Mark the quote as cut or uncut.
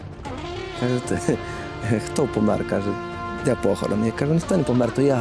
uncut